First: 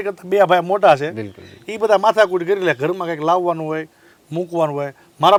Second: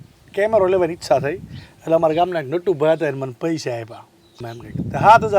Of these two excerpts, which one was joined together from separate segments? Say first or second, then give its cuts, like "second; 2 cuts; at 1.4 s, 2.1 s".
second; 1 cut; at 4.3 s